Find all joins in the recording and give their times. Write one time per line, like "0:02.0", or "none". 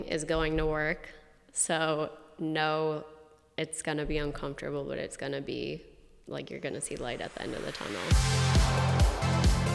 0:08.1